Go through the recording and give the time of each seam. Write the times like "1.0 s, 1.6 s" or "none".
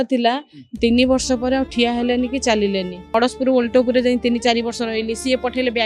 3.0 s